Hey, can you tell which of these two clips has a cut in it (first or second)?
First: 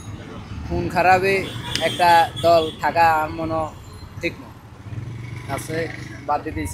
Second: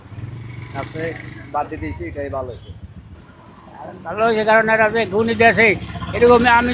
second